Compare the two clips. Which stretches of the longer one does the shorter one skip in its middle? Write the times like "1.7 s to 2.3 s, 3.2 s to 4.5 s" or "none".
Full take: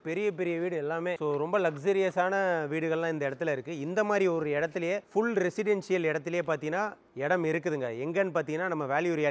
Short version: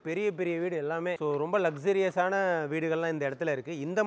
none